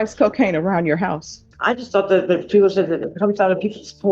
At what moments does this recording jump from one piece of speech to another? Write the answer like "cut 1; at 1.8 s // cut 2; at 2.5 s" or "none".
cut 1; at 1.5 s